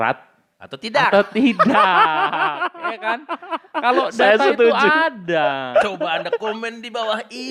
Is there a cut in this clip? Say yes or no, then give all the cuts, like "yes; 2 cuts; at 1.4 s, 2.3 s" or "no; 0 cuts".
no; 0 cuts